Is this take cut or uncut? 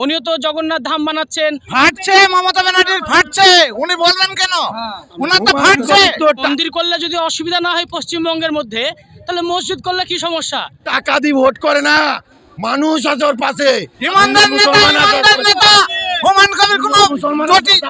cut